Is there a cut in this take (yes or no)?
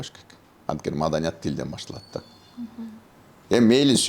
no